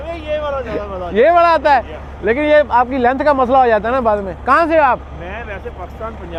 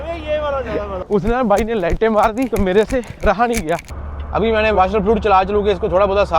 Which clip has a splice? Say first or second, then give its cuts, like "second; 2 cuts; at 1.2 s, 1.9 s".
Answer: second; 2 cuts; at 1.0 s, 3.9 s